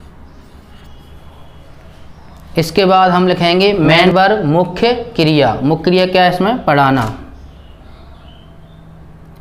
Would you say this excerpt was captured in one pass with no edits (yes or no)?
no